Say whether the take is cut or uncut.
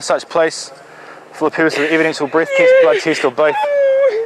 uncut